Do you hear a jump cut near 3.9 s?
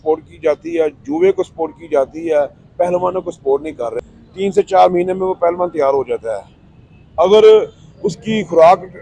yes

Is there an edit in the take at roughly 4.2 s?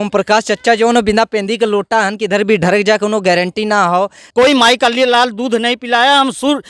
yes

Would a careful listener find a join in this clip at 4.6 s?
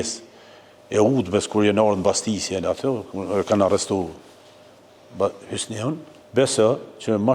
no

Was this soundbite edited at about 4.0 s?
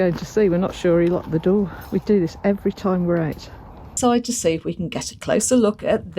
yes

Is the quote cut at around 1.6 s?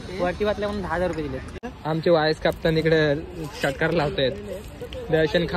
yes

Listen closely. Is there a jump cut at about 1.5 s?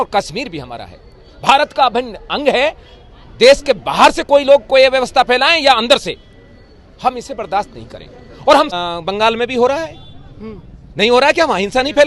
no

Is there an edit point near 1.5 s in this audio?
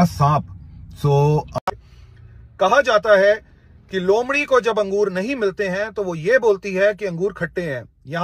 yes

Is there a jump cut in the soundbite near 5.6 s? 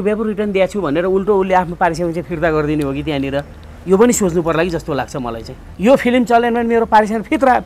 yes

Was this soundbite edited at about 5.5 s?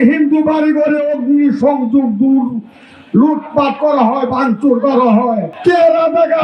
yes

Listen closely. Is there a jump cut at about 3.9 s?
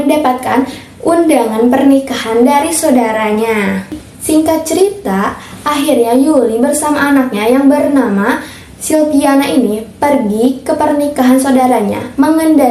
yes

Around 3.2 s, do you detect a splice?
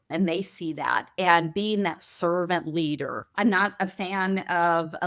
yes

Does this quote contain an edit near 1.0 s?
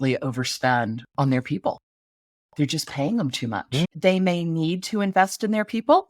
yes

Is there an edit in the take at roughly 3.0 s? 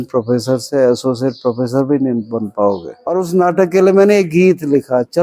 yes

